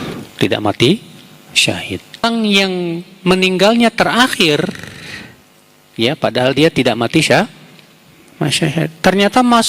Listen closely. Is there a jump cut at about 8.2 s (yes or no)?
no